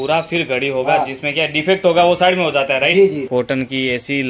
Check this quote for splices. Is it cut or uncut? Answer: cut